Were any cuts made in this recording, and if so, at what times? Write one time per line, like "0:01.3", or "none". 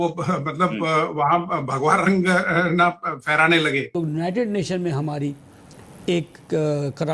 0:03.9